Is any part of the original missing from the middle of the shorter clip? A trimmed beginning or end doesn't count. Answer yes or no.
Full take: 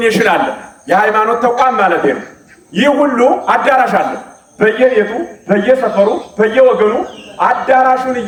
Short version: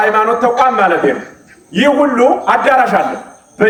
no